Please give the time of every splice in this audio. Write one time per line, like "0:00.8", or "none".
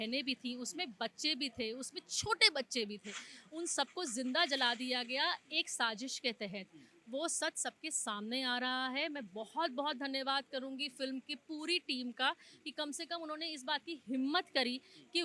none